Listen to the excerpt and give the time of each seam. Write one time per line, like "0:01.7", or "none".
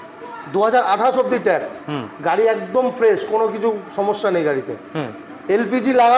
none